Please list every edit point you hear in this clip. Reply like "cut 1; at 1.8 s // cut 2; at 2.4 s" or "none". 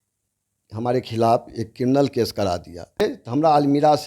cut 1; at 3.0 s